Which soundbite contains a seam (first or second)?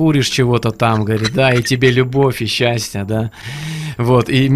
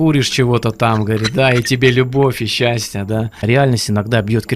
second